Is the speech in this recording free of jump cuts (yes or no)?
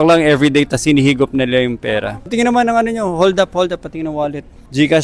yes